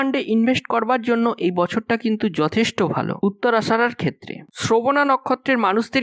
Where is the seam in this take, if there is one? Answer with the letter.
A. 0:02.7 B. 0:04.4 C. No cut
B